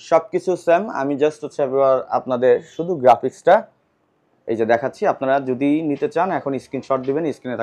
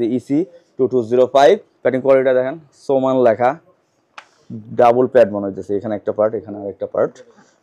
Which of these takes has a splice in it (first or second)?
second